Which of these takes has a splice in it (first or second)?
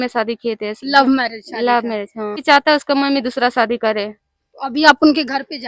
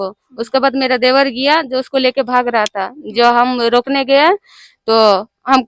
first